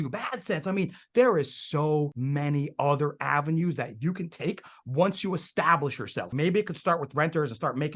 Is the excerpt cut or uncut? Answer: cut